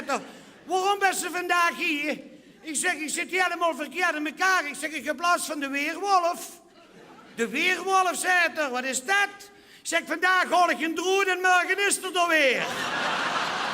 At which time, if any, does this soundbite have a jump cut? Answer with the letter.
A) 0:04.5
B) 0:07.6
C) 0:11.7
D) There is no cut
A